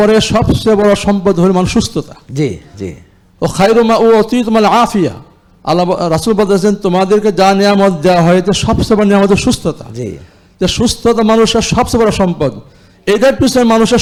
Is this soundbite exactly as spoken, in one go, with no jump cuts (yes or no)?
yes